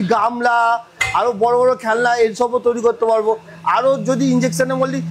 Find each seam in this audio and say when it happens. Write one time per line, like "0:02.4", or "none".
none